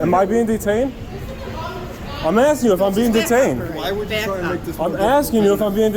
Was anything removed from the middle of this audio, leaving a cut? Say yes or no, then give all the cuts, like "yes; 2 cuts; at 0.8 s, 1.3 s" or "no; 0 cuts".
no; 0 cuts